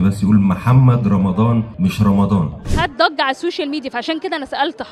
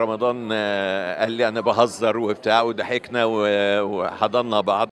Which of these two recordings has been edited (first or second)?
first